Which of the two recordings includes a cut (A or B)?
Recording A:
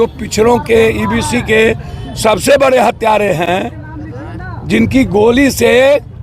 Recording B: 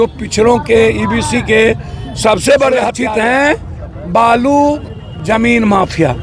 B